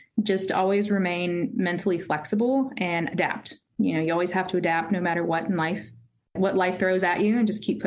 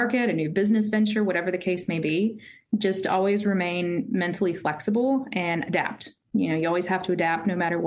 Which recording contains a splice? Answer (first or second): first